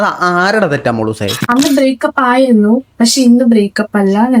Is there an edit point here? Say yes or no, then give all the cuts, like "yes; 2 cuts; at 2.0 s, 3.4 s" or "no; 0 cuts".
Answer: yes; 1 cut; at 1.3 s